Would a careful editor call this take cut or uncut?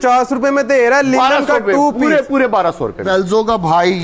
cut